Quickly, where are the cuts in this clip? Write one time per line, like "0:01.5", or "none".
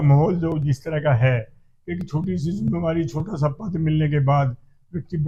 none